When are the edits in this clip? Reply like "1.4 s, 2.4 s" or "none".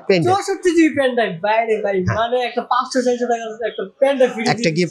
none